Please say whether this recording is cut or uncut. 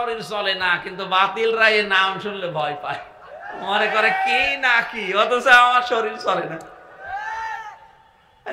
uncut